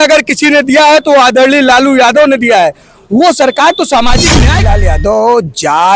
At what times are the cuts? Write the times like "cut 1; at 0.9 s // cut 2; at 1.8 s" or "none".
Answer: cut 1; at 4.4 s